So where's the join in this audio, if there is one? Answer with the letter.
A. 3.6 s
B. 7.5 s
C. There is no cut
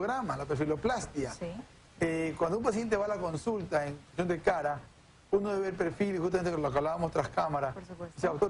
B